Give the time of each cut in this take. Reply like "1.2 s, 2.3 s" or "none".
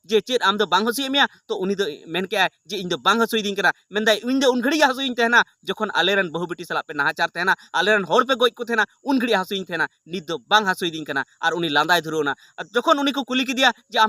10.3 s